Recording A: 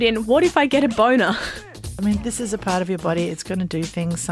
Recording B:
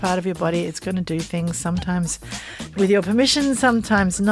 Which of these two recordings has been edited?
A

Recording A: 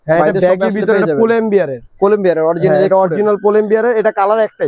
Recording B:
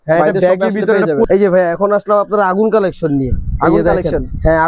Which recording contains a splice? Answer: B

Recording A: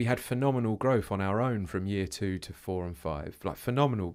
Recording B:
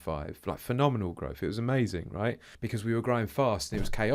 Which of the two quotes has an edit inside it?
B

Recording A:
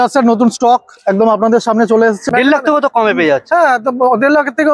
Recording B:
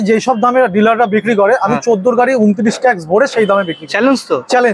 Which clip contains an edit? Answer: A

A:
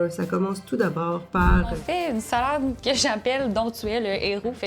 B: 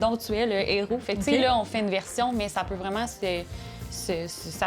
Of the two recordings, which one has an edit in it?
A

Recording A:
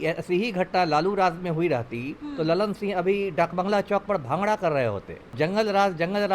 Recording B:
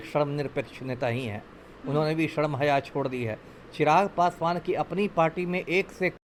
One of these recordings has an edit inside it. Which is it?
A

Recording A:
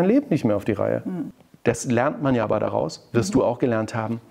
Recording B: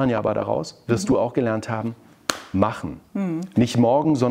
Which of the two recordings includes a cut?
A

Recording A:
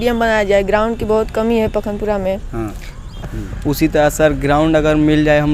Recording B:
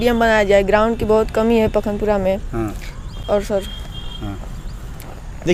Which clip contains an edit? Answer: A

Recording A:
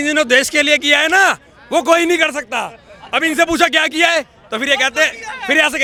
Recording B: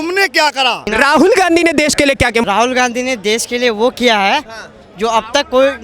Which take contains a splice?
B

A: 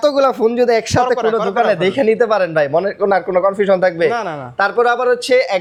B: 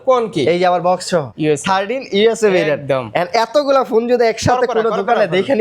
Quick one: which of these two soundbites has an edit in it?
B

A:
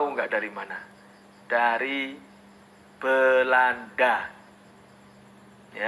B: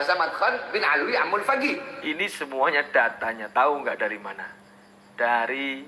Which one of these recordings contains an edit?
B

